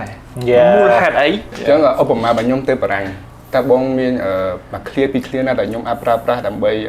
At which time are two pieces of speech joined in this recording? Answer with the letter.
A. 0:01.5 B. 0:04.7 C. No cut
A